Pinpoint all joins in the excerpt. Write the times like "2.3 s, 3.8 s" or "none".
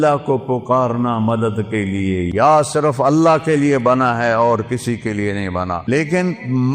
2.3 s, 5.9 s